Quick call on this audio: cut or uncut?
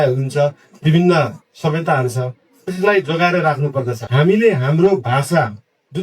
cut